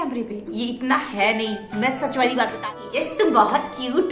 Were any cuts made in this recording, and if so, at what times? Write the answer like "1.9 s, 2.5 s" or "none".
2.6 s